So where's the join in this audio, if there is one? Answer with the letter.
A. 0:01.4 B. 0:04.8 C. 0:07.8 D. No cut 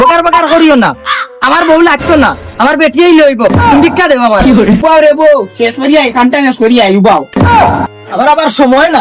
B